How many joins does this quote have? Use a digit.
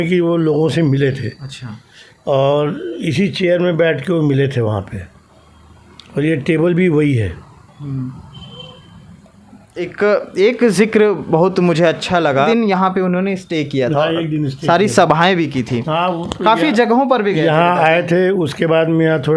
0